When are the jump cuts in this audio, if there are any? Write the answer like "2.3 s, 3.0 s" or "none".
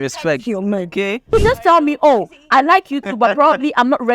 1.3 s